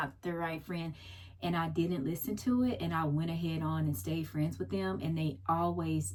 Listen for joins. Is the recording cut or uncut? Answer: uncut